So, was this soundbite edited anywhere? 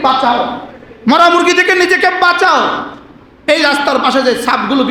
no; 0 cuts

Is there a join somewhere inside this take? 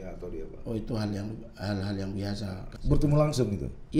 yes; 1 cut; at 2.7 s

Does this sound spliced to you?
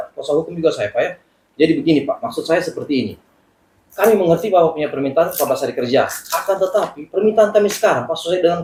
no; 0 cuts

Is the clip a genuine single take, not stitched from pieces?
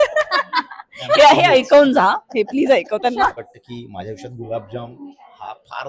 no; 1 cut; at 3.3 s

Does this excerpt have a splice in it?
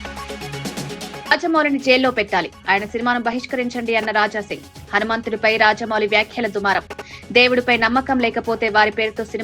yes; 1 cut; at 1.3 s

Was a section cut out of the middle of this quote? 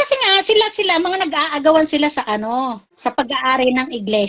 yes; 1 cut; at 2.9 s

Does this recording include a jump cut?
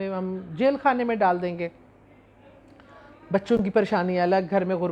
no; 0 cuts

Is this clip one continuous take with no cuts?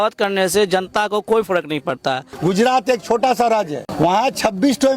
no; 2 cuts; at 2.3 s, 3.8 s

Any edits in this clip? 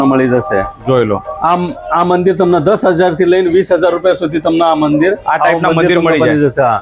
no; 0 cuts

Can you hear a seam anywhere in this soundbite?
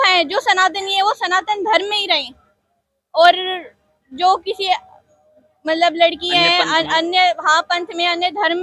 no; 0 cuts

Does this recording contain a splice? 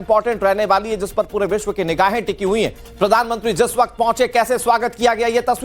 yes; 1 cut; at 3.4 s

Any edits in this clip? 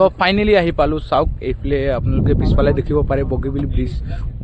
no; 0 cuts

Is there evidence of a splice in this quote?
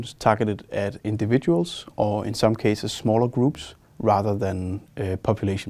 no; 0 cuts

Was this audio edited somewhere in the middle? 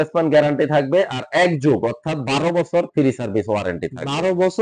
no; 0 cuts

